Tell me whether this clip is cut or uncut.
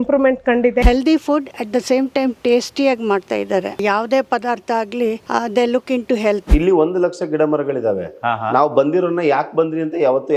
cut